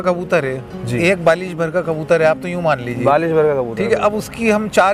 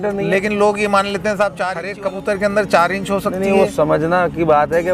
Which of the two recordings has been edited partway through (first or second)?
second